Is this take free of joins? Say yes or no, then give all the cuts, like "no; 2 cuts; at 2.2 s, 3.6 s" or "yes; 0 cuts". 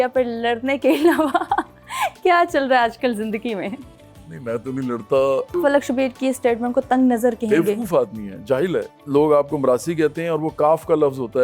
no; 2 cuts; at 5.6 s, 9.0 s